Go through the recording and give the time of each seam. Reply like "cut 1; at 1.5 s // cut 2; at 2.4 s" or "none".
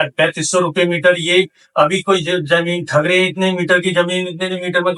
none